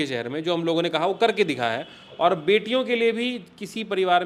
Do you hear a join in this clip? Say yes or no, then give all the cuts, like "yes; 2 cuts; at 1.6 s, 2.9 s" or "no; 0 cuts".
no; 0 cuts